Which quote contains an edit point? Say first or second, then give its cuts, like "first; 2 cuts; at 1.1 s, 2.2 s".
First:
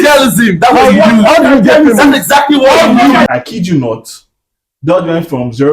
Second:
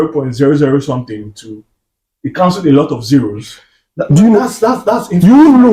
first; 1 cut; at 3.3 s